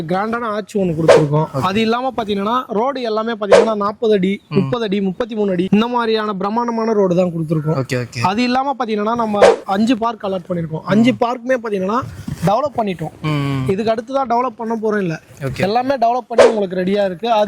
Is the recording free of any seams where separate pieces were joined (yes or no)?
yes